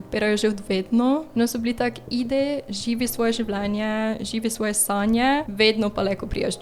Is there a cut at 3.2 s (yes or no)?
no